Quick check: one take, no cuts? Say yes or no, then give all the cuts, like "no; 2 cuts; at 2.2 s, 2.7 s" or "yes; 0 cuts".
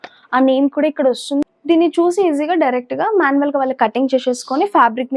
no; 1 cut; at 1.4 s